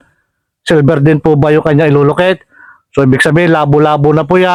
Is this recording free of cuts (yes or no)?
yes